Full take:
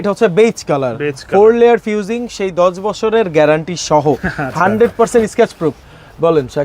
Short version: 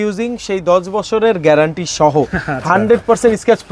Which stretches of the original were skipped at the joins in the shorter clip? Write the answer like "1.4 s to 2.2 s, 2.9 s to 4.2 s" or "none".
none